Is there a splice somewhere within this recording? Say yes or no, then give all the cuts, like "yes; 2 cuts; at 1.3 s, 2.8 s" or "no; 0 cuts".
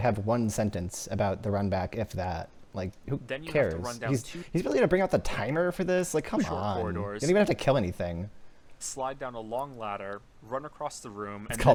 no; 0 cuts